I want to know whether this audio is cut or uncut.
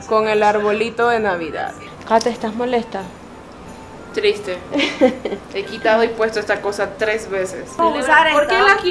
cut